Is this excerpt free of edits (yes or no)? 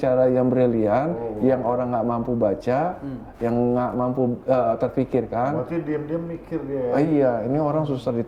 yes